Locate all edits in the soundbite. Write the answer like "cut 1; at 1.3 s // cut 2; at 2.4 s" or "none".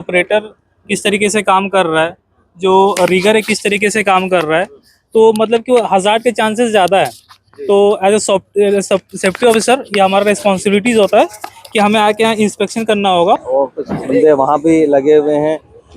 cut 1; at 13.4 s